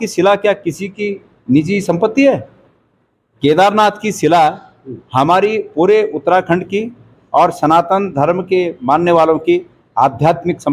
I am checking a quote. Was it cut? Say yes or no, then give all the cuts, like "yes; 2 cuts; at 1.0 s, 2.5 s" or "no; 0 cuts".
no; 0 cuts